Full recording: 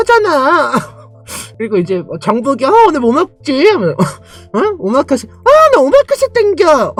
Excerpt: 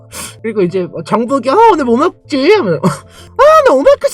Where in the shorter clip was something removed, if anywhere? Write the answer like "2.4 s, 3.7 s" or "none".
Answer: 3.2 s